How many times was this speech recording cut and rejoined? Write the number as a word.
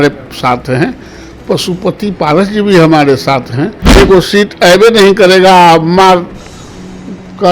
one